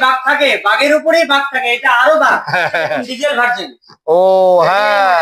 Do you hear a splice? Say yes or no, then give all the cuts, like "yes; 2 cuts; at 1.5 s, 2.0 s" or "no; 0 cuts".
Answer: yes; 1 cut; at 3.1 s